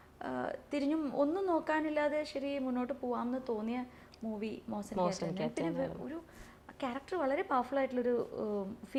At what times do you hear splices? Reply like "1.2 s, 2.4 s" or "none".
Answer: none